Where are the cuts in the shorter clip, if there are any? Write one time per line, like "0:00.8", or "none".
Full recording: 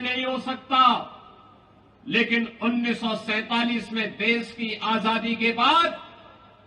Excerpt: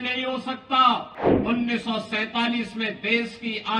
0:01.4